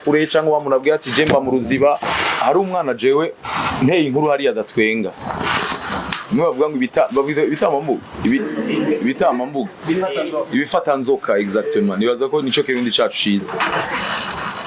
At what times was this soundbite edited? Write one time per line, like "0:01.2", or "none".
0:02.1